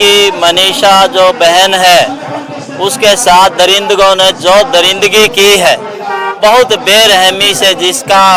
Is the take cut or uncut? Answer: uncut